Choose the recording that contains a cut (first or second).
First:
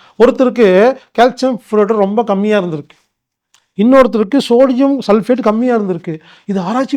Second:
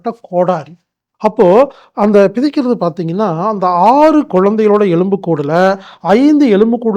second